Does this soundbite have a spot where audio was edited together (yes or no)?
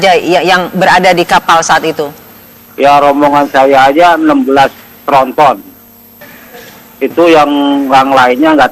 yes